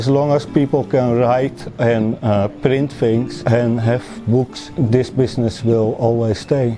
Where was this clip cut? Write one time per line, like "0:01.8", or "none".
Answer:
0:03.4
0:04.6